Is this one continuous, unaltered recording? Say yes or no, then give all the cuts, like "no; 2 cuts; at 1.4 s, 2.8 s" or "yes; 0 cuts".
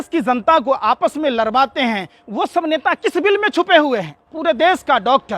no; 1 cut; at 4.2 s